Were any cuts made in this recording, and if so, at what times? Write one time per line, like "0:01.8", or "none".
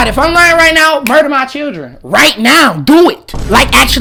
none